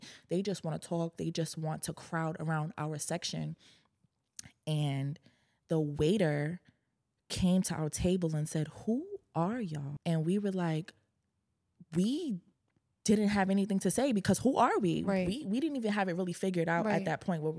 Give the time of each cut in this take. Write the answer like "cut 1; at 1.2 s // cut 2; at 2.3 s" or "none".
cut 1; at 9.9 s